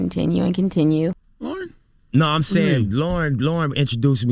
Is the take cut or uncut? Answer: cut